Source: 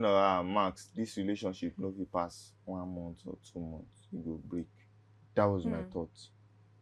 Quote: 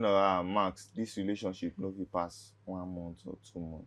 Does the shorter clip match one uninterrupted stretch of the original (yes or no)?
yes